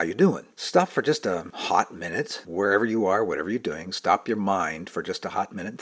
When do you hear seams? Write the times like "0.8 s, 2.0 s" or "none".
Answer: none